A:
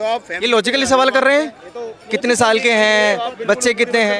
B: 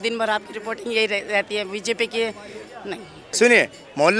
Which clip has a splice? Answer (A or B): B